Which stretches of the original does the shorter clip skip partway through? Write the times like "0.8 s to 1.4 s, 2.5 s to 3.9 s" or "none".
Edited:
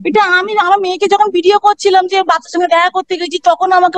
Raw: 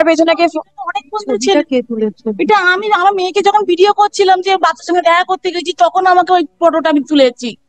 none